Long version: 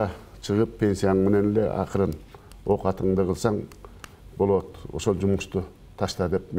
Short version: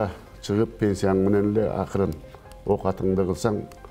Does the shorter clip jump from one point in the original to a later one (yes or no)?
no